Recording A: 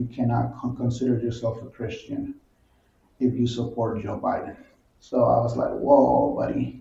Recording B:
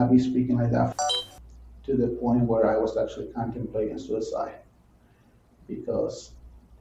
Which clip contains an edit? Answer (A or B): B